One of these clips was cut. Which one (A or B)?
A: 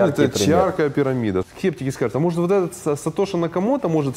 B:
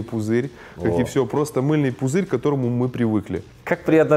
A